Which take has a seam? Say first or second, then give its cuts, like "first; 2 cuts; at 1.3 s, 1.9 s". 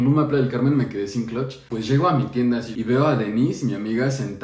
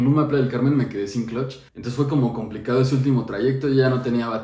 first; 2 cuts; at 1.6 s, 2.7 s